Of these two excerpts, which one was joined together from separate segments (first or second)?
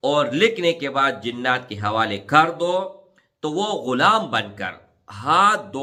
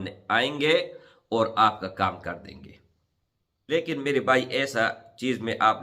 second